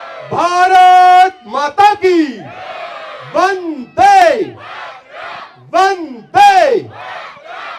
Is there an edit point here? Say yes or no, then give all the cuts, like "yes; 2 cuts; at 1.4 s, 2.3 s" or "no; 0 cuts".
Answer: no; 0 cuts